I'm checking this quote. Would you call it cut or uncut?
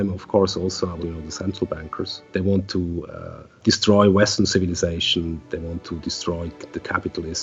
cut